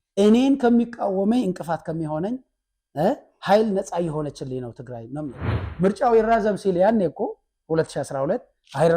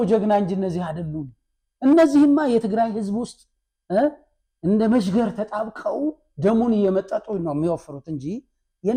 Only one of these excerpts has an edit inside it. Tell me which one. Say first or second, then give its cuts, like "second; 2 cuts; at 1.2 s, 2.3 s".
first; 1 cut; at 5.6 s